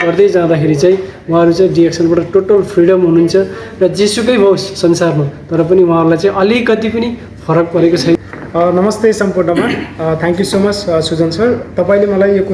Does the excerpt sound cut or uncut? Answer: cut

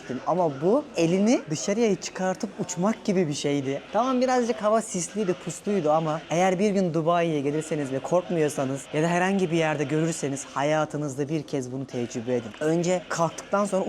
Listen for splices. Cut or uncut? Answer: uncut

